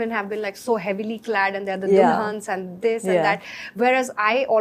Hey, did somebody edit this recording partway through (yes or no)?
no